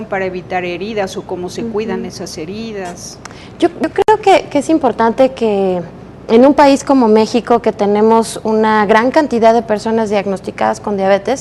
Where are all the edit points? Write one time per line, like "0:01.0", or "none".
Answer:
0:05.3